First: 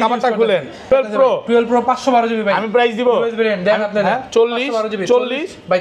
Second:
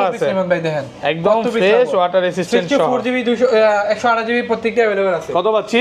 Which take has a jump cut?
first; 1 cut; at 0.9 s

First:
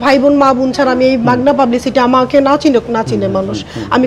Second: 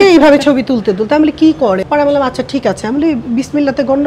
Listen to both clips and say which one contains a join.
second; 1 cut; at 1.8 s

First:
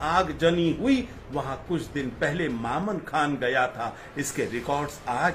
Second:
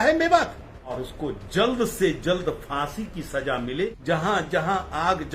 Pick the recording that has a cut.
second; 2 cuts; at 0.9 s, 4.0 s

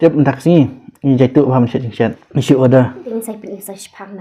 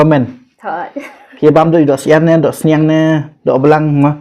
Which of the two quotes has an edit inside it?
first; 2 cuts; at 2.3 s, 3.0 s

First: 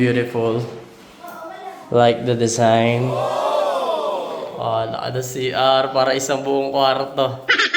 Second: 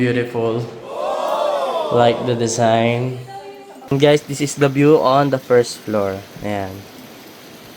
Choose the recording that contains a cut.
second; 2 cuts; at 3.3 s, 6.8 s

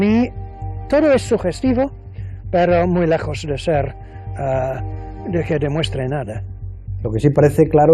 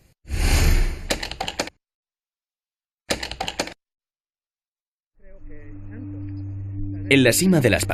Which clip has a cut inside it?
first; 1 cut; at 5.9 s

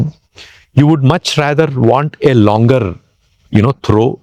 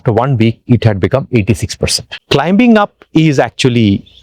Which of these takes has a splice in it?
second; 1 cut; at 2.1 s

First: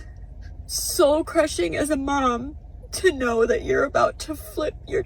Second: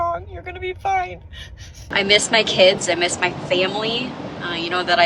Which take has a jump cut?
second; 2 cuts; at 1.8 s, 2.8 s

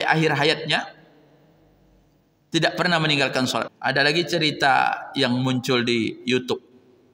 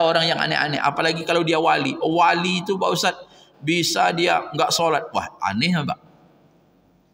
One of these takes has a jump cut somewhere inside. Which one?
first; 1 cut; at 3.7 s

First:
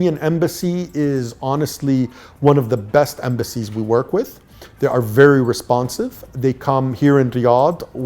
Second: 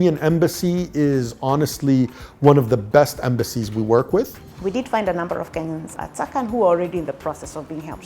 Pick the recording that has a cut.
second; 2 cuts; at 4.4 s, 5.9 s

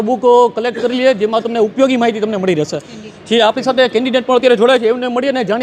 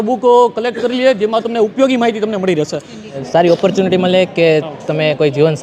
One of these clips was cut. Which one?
second; 1 cut; at 3.2 s

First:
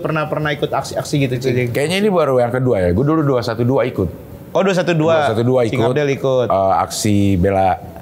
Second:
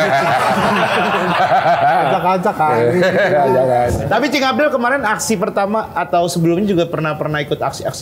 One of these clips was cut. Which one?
second; 1 cut; at 4.0 s

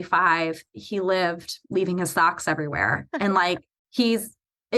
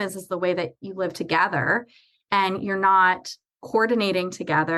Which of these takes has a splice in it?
first; 1 cut; at 3.8 s

